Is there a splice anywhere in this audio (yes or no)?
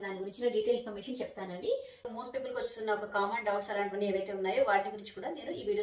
yes